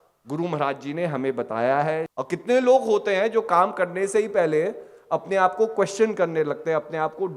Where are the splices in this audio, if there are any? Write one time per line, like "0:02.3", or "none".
0:02.1